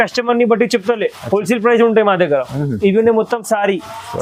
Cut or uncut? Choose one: uncut